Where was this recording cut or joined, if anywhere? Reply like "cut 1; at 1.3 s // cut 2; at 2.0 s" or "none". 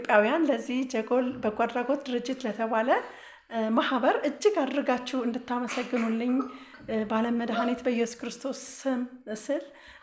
none